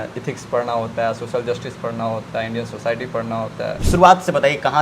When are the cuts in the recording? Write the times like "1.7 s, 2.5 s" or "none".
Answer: 3.8 s